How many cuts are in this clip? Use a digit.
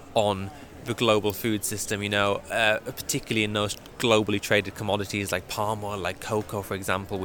0